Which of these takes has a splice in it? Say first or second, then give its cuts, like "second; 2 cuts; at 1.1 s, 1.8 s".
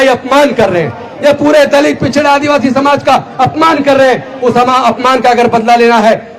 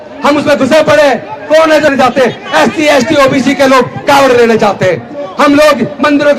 second; 1 cut; at 1.9 s